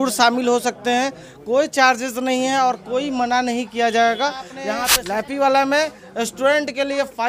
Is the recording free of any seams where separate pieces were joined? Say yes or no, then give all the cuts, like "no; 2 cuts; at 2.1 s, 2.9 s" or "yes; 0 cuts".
no; 1 cut; at 4.8 s